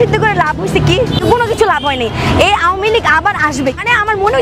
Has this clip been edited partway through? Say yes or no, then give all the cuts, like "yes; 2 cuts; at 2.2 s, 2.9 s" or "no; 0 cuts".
no; 0 cuts